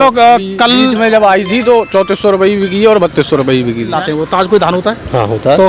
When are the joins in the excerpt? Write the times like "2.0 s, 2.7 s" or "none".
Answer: 3.9 s